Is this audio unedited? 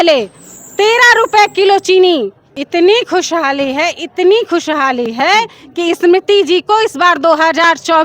no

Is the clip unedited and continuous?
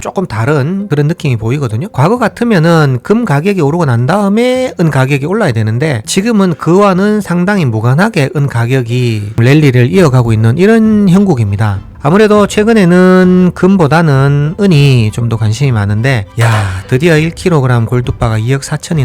no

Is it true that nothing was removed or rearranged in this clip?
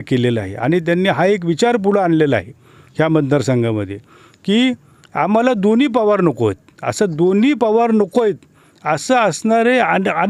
yes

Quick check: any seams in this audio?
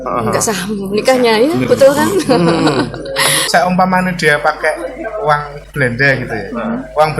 yes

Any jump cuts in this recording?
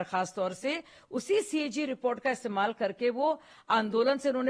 no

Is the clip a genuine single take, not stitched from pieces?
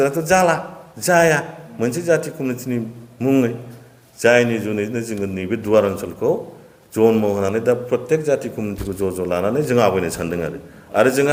yes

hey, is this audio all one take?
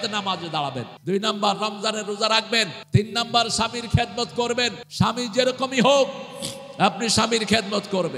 no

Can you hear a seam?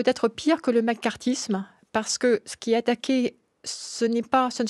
no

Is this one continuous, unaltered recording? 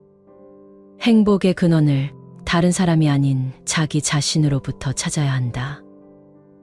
no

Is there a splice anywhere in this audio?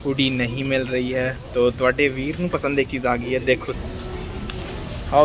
no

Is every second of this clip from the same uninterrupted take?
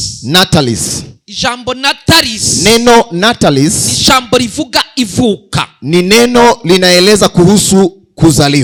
yes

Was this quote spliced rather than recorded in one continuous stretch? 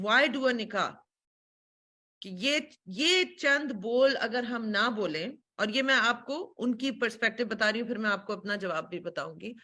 no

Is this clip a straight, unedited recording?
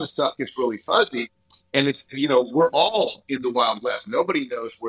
yes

